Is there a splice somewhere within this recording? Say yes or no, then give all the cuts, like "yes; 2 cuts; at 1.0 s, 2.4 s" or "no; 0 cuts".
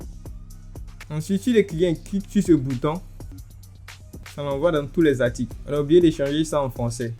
no; 0 cuts